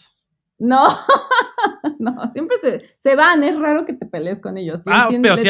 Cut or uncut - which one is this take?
uncut